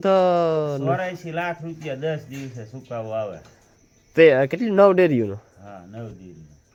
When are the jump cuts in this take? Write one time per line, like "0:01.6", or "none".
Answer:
none